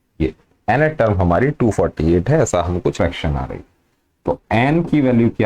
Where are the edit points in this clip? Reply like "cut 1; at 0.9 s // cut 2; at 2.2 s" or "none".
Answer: cut 1; at 2.9 s